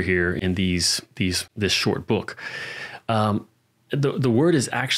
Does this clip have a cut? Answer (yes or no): no